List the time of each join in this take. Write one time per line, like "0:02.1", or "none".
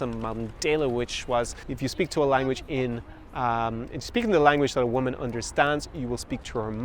0:01.6